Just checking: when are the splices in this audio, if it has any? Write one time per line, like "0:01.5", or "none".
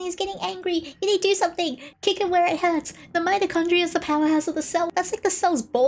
0:01.9
0:04.9